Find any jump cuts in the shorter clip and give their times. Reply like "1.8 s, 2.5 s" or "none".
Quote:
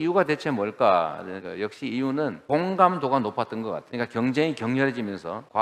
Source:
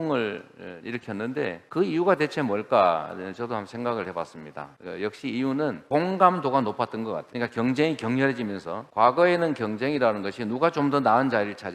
1.3 s